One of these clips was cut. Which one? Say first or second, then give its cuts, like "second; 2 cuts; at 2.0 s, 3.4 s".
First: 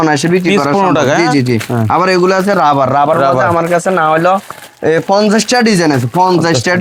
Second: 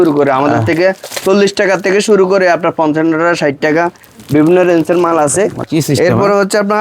second; 1 cut; at 5.6 s